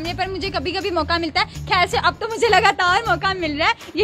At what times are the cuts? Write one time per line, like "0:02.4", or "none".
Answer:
none